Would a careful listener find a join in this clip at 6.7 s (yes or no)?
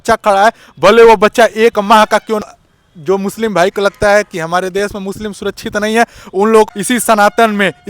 yes